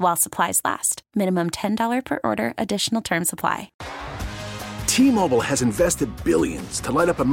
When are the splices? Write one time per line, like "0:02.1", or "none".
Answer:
0:03.8